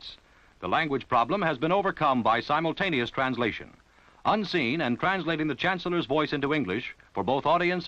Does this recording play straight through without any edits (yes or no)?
yes